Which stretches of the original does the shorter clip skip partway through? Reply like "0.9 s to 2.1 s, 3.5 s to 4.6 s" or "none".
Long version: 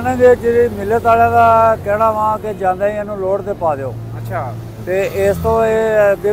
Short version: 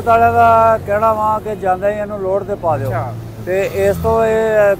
3.9 s to 4.3 s